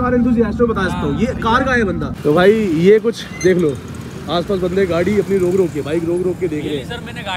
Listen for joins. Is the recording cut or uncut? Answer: cut